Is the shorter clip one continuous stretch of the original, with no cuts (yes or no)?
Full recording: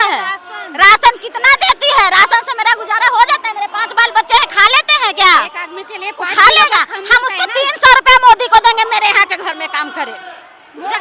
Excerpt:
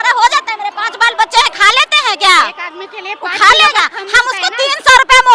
yes